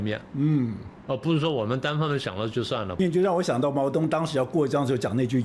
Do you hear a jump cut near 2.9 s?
yes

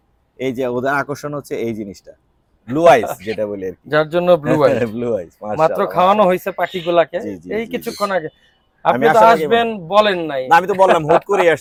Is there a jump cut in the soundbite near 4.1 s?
no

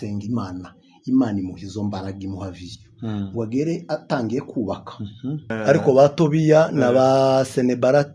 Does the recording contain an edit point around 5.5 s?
yes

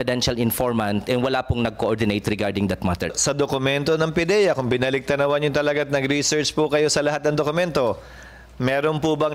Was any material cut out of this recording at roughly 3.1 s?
yes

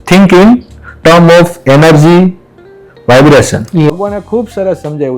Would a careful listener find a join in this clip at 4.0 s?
yes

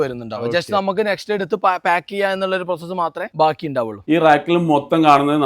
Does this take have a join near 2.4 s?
no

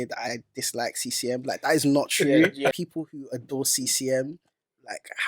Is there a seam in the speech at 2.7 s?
yes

